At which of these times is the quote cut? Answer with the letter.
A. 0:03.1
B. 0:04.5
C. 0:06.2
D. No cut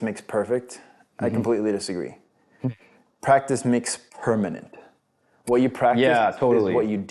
D